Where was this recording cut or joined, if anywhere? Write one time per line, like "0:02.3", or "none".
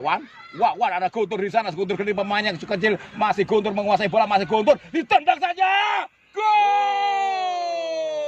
none